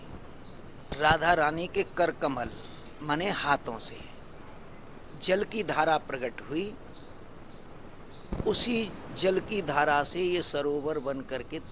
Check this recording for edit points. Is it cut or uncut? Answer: cut